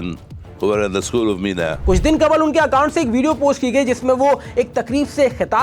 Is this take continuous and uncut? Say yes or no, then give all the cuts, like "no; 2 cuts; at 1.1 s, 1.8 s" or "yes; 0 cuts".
no; 1 cut; at 1.8 s